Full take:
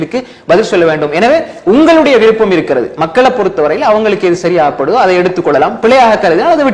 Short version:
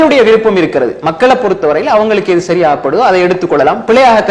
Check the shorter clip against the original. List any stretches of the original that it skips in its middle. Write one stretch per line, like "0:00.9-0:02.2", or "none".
none